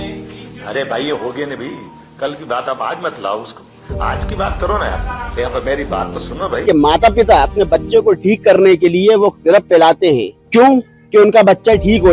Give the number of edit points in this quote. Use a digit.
2